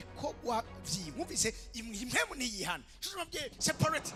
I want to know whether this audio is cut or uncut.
uncut